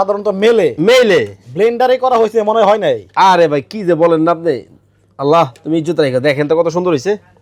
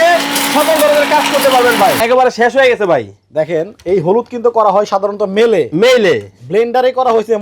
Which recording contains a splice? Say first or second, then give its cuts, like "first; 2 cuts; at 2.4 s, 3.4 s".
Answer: second; 1 cut; at 2.0 s